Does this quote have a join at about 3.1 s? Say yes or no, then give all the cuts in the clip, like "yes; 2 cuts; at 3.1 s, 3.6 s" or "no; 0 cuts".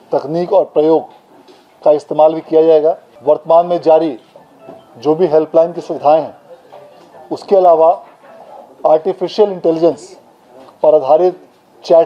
yes; 1 cut; at 3.1 s